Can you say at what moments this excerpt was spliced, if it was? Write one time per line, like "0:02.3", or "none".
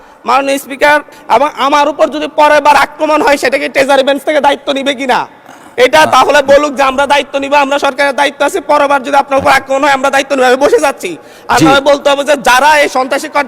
0:01.1